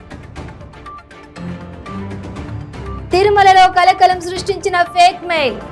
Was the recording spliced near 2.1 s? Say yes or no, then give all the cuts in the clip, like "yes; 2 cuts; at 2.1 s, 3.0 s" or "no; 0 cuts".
no; 0 cuts